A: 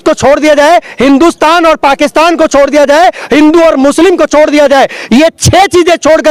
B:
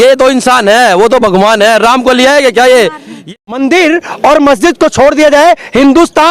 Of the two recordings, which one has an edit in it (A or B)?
B